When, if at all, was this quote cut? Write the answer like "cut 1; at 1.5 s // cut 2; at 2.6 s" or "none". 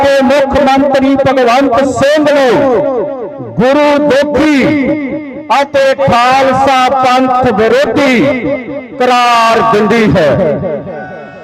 none

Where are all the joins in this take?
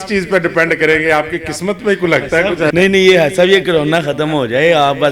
cut 1; at 2.7 s

